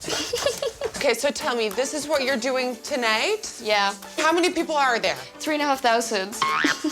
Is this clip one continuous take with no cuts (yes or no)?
no